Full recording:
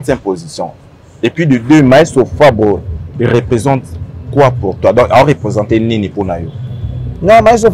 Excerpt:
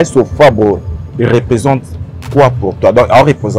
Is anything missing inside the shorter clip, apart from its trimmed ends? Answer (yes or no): no